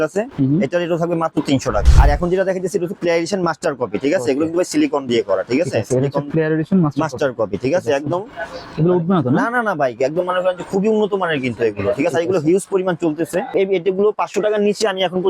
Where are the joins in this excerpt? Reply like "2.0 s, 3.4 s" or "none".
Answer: 1.8 s, 13.5 s